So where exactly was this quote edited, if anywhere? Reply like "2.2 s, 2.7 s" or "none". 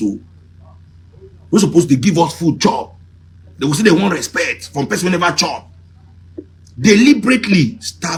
none